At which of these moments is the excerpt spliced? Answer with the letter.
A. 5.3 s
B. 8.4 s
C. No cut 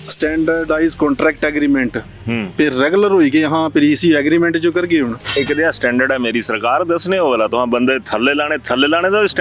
A